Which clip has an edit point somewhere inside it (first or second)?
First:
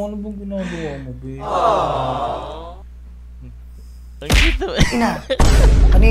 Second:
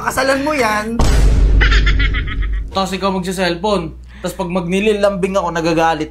second